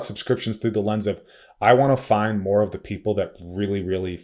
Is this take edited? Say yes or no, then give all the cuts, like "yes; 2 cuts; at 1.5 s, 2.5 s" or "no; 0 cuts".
no; 0 cuts